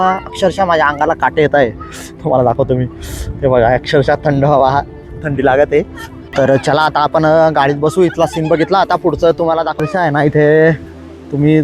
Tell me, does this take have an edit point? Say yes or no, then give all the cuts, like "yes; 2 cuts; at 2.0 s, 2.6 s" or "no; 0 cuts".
yes; 2 cuts; at 6.2 s, 9.8 s